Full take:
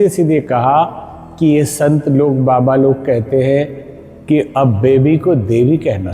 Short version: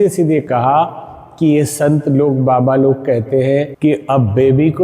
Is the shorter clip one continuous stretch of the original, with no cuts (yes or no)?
no